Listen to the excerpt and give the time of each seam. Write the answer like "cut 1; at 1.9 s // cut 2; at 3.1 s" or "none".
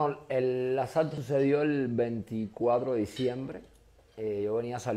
cut 1; at 1.2 s